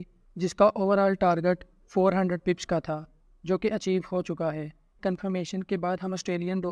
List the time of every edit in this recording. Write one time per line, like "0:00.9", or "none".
0:05.0